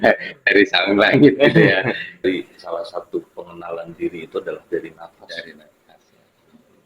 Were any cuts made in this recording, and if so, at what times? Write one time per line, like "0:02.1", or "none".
0:02.1